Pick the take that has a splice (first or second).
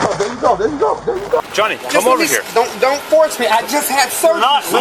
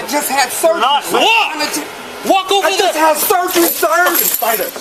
first